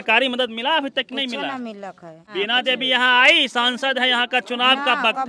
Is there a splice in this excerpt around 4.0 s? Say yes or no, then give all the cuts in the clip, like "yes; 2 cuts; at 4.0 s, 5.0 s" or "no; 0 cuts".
no; 1 cut; at 2.1 s